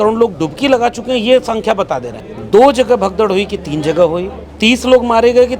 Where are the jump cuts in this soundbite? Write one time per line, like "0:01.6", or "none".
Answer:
none